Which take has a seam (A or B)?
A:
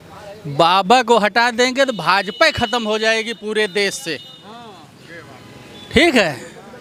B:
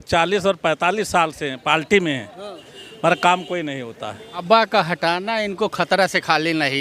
B